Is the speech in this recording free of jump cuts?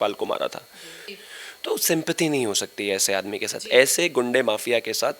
no; 1 cut; at 1.1 s

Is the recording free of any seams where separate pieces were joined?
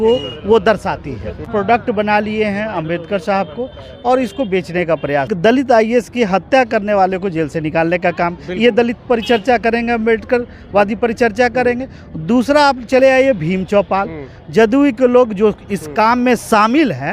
no; 2 cuts; at 1.5 s, 5.3 s

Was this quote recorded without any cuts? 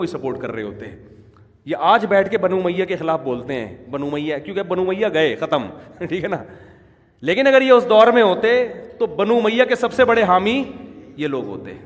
yes; 0 cuts

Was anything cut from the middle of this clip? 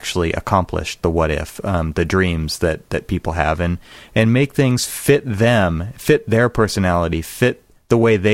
no; 0 cuts

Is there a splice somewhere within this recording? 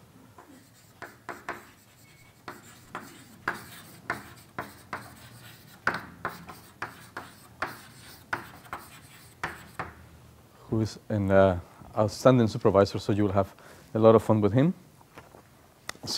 yes; 1 cut; at 8.2 s

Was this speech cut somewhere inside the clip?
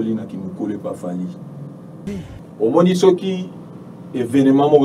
yes; 1 cut; at 2.2 s

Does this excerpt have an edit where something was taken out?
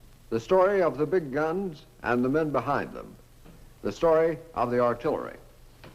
yes; 1 cut; at 2.9 s

